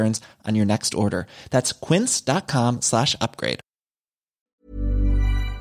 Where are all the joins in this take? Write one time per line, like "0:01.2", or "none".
0:04.5

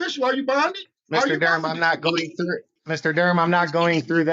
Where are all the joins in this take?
0:00.9
0:02.7

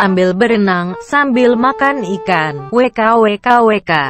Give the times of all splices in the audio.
none

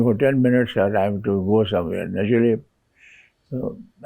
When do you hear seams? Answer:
none

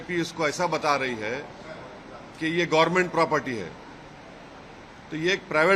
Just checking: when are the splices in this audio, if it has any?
none

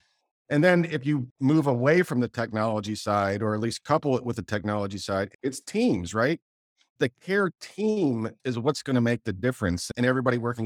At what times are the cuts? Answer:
0:01.3
0:05.3
0:06.9
0:09.9

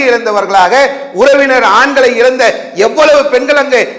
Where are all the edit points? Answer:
none

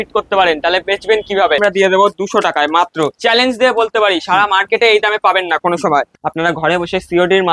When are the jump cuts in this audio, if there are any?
0:01.6
0:03.2
0:06.2

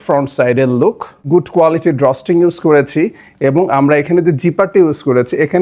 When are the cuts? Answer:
0:01.2

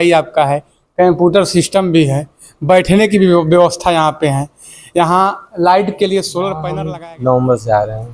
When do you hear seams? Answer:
0:06.6

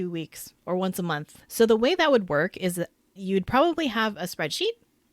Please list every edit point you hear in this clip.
0:01.4
0:03.2

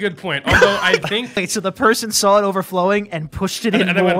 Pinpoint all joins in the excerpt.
0:01.4

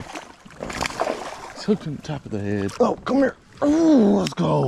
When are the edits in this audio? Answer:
0:02.7

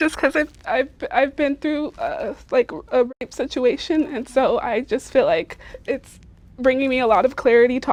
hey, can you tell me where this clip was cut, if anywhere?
none

